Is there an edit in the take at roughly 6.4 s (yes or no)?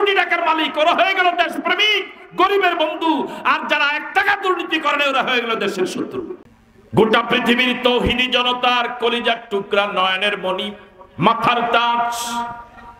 yes